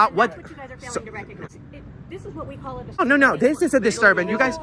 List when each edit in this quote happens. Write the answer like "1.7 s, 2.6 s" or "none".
1.4 s, 3.0 s

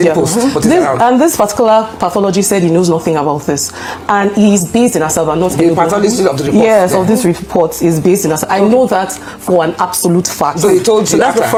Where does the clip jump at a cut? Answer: none

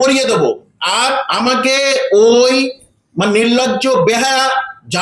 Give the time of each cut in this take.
1.3 s

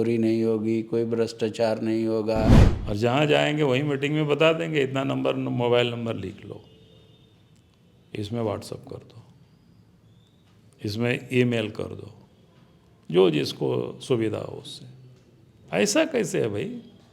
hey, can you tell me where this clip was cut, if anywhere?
2.7 s

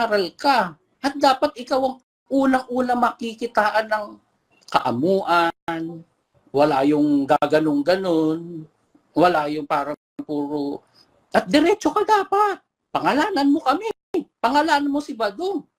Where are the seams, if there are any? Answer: none

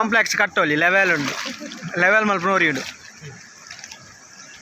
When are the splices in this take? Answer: none

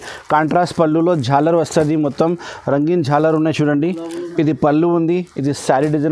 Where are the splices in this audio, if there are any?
none

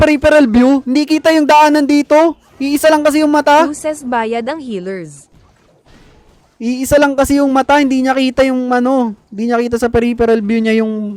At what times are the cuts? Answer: none

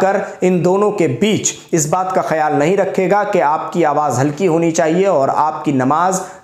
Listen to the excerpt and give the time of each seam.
none

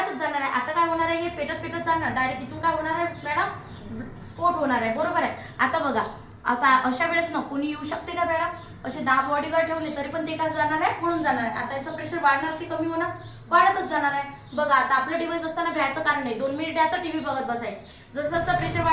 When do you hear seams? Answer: none

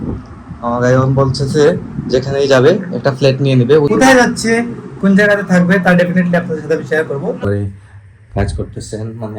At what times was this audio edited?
3.9 s, 7.4 s

